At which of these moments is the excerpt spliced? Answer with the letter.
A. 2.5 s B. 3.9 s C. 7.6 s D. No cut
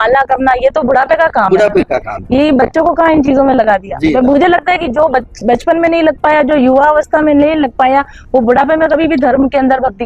D